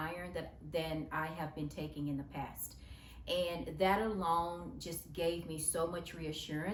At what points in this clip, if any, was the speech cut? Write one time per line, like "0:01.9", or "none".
none